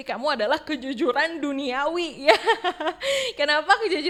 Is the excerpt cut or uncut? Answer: uncut